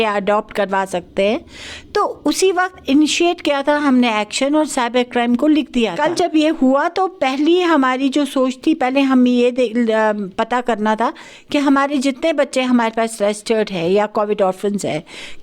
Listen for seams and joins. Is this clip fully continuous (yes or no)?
no